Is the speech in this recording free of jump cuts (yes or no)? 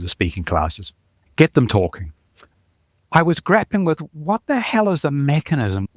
no